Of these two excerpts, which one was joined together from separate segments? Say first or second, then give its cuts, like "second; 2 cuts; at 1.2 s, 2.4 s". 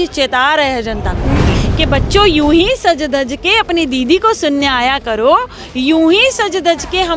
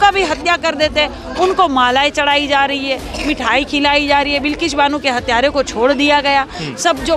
first; 1 cut; at 1.5 s